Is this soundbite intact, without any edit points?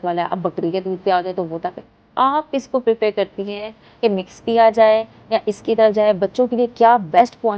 yes; 0 cuts

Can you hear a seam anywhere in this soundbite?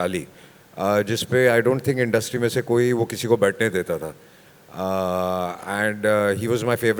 no; 0 cuts

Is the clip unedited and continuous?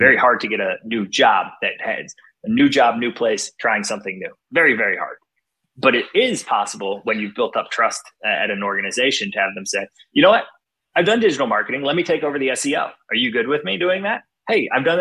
yes; 0 cuts

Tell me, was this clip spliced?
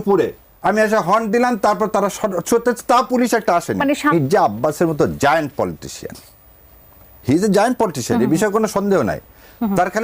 yes; 1 cut; at 4.1 s

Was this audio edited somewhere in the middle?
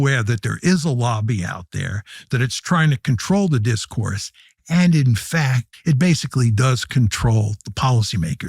yes; 1 cut; at 5.7 s

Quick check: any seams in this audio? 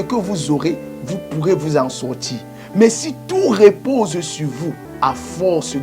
yes; 1 cut; at 4.9 s

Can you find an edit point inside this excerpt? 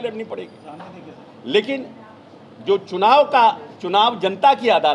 no; 0 cuts

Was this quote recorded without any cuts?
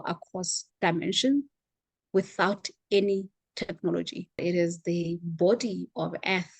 no; 1 cut; at 4.4 s

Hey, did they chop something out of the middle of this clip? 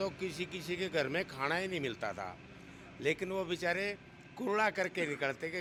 no; 0 cuts

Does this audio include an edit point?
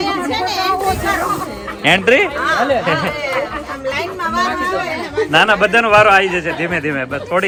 no; 0 cuts

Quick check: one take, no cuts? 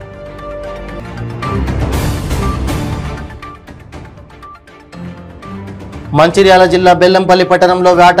yes; 0 cuts

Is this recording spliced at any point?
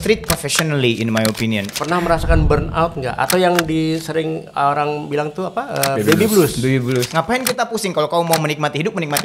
yes; 2 cuts; at 1.7 s, 7.1 s

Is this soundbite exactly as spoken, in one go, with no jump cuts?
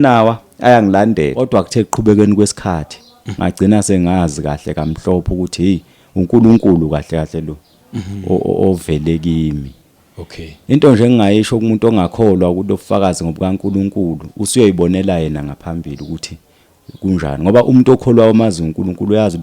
no; 1 cut; at 1.5 s

